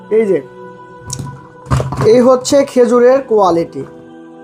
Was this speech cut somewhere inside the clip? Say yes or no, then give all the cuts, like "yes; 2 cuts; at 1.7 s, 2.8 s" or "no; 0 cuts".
yes; 1 cut; at 1.1 s